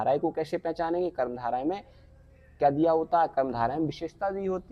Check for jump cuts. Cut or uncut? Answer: uncut